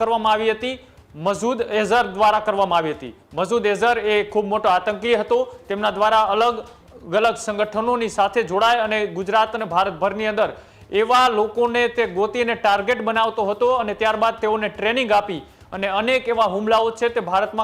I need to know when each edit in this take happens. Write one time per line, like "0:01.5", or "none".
none